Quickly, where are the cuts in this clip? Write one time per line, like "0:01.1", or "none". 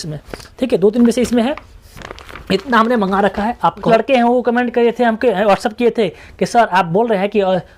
0:03.8